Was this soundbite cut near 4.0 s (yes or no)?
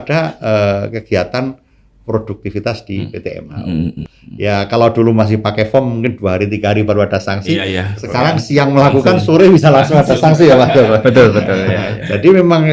yes